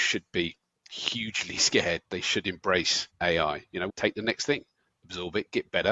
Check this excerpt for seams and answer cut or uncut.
cut